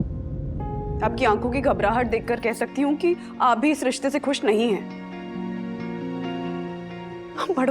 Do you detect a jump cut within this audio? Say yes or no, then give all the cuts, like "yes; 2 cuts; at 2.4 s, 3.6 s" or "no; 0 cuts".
yes; 1 cut; at 1.0 s